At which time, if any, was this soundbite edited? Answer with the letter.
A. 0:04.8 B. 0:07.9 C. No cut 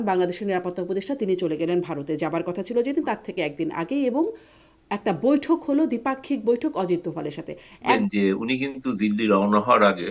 B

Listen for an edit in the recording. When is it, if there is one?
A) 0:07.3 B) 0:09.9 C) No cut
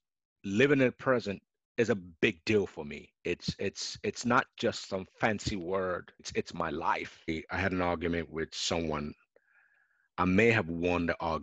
A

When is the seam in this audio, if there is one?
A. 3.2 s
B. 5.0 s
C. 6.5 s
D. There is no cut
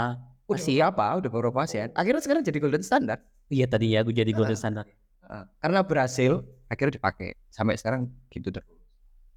D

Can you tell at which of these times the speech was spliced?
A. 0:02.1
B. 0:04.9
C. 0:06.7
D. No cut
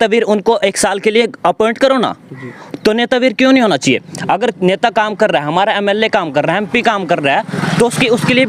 D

